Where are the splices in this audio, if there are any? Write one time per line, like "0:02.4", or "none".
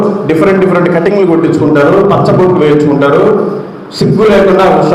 none

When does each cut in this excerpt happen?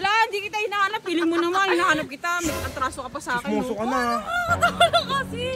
none

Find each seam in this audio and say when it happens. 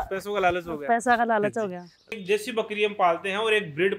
0:02.1

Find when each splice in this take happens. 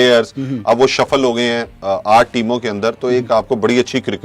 none

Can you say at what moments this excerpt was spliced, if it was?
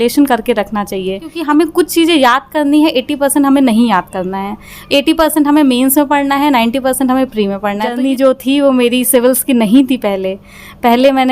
0:01.3
0:07.9

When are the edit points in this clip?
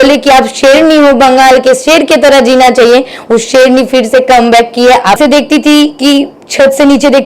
0:05.2

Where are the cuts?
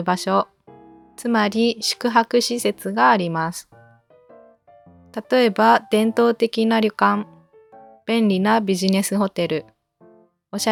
none

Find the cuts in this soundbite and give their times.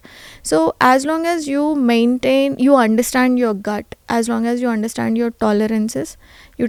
none

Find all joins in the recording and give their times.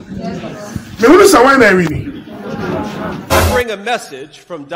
0:03.2

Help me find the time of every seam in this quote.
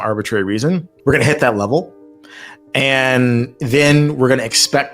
0:00.9

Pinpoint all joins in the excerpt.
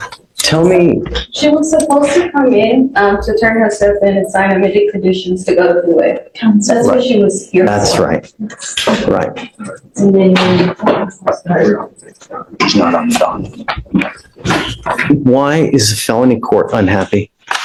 none

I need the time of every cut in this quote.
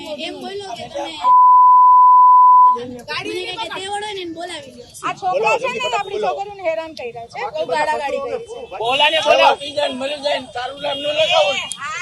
0:04.9
0:08.6

